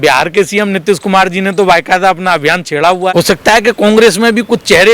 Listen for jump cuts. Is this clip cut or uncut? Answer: cut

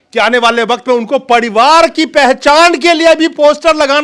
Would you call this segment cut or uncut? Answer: uncut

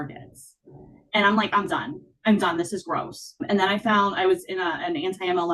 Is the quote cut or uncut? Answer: uncut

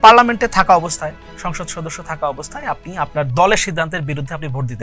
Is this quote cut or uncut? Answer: uncut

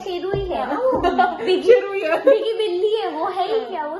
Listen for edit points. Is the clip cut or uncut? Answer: uncut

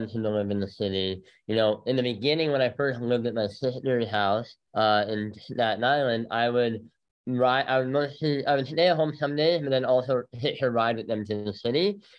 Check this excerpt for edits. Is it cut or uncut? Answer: cut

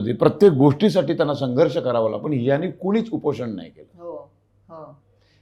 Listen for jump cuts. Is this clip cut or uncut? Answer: uncut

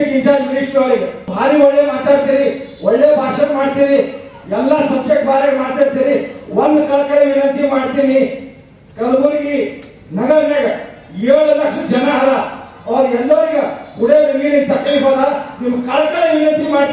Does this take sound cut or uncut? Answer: cut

